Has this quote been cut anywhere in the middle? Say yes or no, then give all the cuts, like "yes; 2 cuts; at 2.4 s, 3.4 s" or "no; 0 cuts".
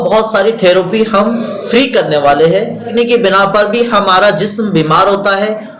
yes; 1 cut; at 2.9 s